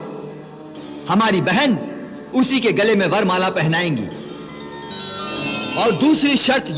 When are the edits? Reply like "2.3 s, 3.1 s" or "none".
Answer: 5.6 s